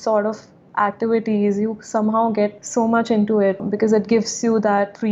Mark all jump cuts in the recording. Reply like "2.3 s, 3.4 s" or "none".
2.6 s, 3.6 s